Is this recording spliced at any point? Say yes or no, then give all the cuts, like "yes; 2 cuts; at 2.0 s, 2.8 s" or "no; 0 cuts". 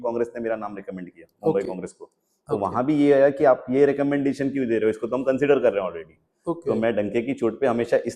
no; 0 cuts